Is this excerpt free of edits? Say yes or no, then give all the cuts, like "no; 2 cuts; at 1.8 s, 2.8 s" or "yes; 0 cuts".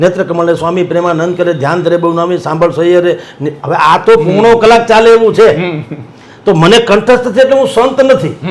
yes; 0 cuts